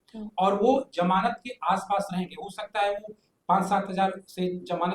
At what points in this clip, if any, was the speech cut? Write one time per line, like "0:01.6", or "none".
none